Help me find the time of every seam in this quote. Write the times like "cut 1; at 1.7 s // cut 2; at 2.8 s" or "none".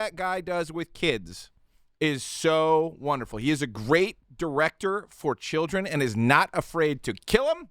cut 1; at 4.2 s

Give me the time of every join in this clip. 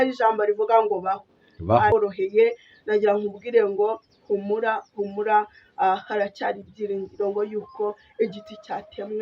cut 1; at 1.9 s

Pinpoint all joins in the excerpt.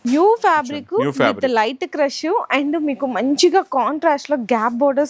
none

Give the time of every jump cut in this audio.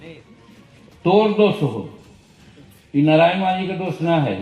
none

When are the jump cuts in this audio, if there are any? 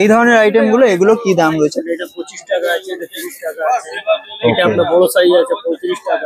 none

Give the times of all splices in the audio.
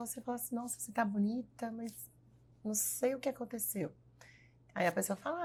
none

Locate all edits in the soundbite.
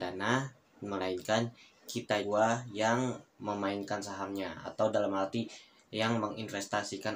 cut 1; at 2.2 s

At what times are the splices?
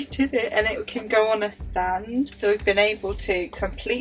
cut 1; at 2.3 s

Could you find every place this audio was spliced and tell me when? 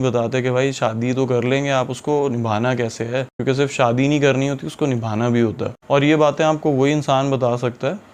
none

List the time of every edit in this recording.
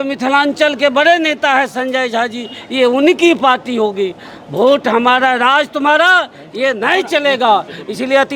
none

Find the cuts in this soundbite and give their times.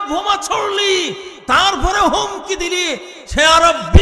none

